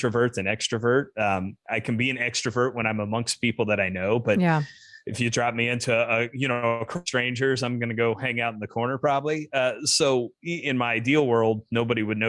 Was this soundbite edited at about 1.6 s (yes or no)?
yes